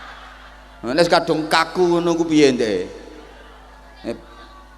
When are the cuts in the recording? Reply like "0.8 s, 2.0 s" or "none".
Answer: none